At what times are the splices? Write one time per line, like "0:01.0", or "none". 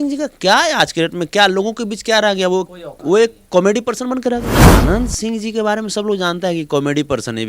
0:04.6